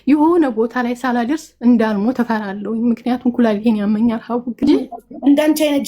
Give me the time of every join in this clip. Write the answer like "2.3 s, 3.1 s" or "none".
4.6 s